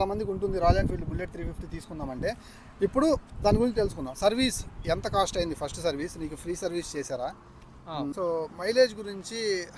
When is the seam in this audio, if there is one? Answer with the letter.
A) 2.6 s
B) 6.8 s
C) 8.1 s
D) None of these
C